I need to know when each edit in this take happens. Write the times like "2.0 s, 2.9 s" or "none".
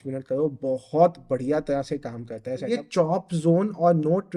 2.7 s